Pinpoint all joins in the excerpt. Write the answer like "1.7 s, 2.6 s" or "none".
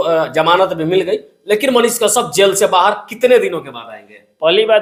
none